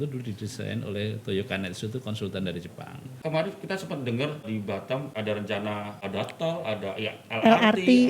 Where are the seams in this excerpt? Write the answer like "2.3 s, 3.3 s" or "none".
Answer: 3.2 s, 4.7 s, 6.0 s